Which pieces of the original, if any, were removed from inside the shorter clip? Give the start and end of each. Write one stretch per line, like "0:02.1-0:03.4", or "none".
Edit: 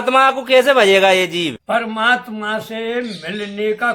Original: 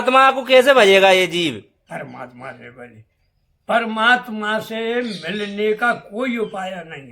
0:01.6-0:03.6